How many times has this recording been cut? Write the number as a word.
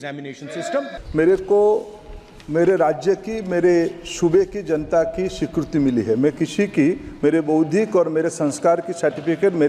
one